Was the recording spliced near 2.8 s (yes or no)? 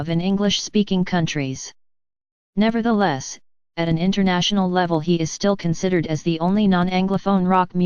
no